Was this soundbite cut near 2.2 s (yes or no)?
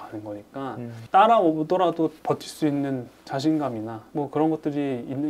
yes